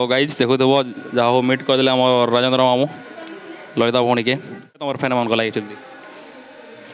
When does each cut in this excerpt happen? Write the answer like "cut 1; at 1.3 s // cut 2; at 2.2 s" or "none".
cut 1; at 4.9 s